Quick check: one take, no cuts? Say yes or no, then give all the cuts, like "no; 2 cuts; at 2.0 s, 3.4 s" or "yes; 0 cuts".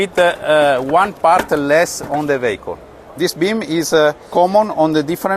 no; 2 cuts; at 3.0 s, 4.3 s